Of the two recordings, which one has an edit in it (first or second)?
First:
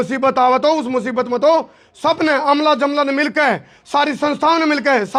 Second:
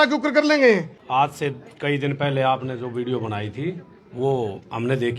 second